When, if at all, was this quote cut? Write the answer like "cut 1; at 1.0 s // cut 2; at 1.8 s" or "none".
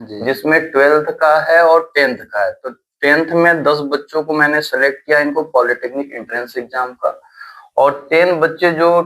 none